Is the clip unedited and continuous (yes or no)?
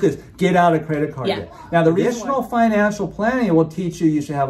no